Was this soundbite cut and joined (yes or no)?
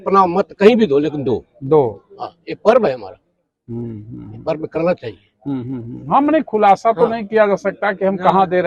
no